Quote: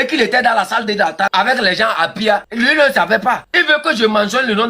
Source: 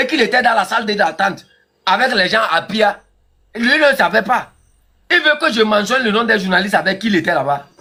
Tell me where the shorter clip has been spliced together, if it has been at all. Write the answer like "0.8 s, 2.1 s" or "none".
1.3 s, 2.5 s, 3.5 s